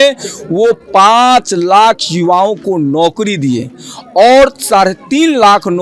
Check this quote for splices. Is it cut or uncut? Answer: uncut